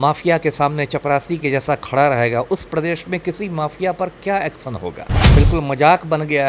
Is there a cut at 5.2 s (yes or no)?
yes